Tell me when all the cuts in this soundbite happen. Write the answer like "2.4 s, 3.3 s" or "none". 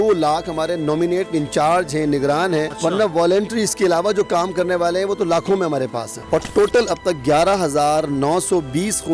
2.7 s, 6.1 s